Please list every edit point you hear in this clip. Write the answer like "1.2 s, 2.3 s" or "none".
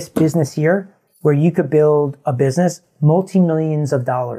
1.0 s